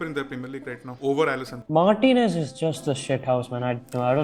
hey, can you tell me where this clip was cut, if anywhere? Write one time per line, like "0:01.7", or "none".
0:01.6